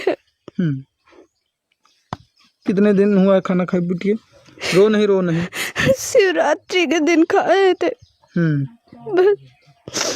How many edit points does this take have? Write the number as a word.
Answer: zero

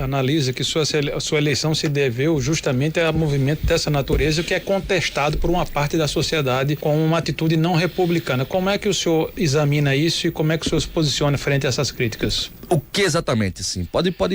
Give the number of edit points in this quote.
zero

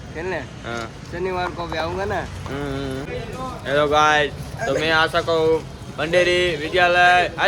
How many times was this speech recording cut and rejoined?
one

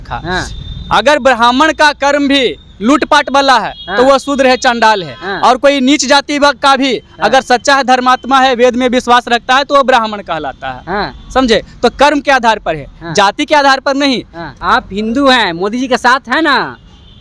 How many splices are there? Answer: one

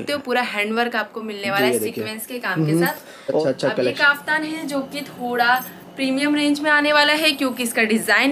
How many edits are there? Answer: one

